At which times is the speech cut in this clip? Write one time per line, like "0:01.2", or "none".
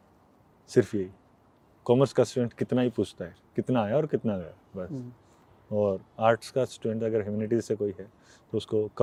none